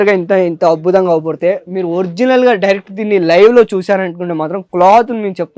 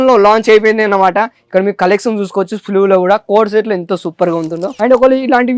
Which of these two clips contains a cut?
second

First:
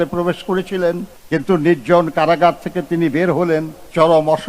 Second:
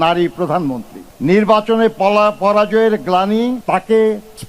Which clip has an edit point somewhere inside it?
second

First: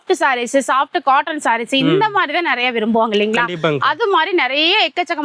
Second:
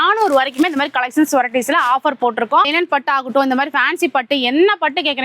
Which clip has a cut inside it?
second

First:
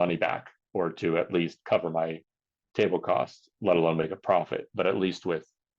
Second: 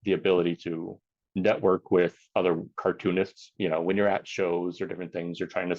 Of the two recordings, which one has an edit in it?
second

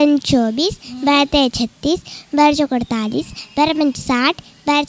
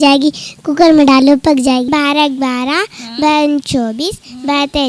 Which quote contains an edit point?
second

